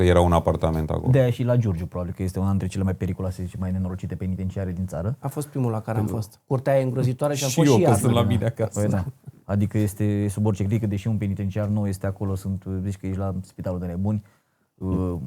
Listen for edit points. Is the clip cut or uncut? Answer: uncut